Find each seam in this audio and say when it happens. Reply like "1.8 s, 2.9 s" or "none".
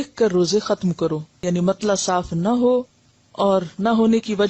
1.4 s